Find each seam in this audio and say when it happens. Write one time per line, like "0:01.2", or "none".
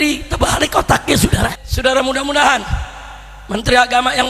0:01.7